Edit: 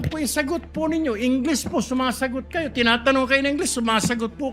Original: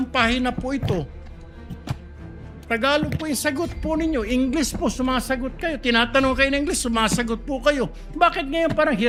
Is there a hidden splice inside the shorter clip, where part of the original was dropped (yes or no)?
no